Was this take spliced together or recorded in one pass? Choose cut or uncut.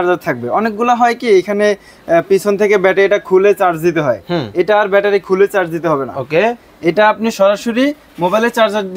uncut